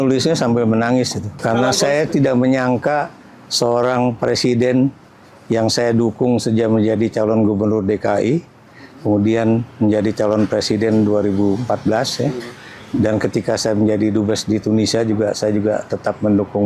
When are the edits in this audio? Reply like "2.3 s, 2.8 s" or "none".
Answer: 1.2 s